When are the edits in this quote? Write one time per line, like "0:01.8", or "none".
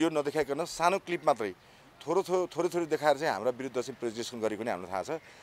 none